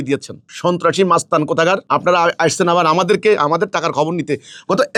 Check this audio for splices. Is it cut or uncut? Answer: uncut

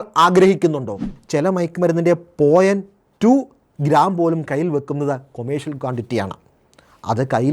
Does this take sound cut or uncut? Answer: cut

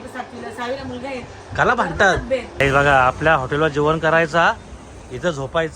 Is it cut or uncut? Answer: cut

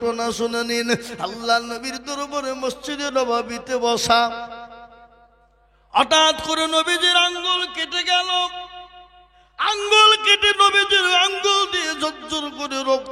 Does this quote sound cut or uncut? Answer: uncut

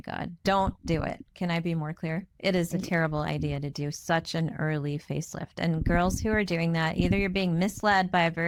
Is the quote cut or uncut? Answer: uncut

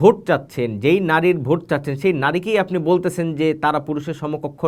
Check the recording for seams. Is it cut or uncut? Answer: uncut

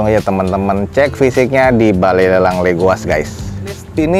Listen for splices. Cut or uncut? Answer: uncut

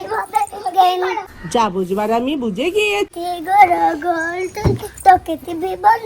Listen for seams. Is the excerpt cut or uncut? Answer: cut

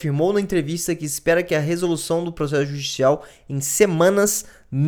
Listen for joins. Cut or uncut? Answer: uncut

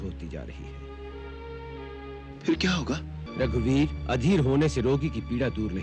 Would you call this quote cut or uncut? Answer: cut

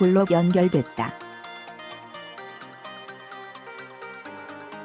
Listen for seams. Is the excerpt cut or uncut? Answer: cut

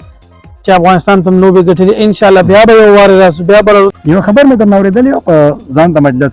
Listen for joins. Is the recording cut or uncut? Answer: cut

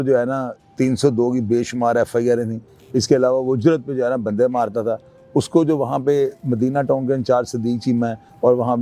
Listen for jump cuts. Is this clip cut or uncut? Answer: uncut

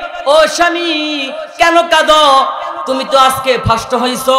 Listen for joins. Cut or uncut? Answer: uncut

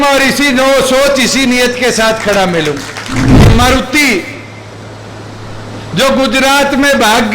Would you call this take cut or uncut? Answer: cut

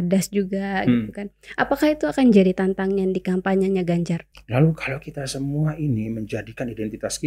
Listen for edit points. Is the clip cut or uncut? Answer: cut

